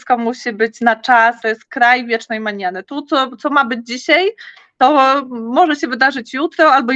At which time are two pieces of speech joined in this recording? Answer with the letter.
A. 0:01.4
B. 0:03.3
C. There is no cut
A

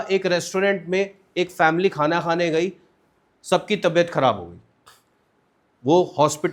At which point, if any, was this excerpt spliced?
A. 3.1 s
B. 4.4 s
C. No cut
C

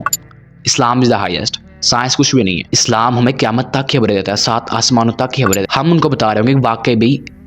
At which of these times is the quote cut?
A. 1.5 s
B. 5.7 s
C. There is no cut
B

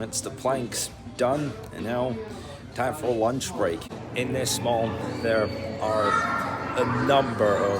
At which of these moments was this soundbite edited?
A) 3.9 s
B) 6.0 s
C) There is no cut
A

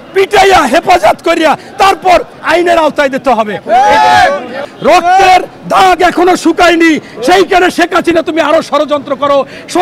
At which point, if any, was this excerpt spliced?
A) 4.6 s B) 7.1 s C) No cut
A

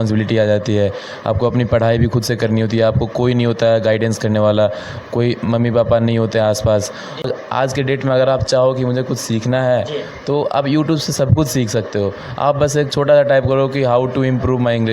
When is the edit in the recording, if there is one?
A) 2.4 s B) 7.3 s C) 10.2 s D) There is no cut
B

